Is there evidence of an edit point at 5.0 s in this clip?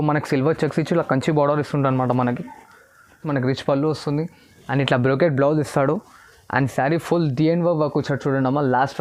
no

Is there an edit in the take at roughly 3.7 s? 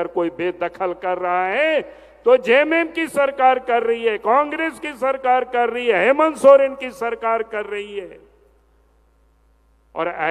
no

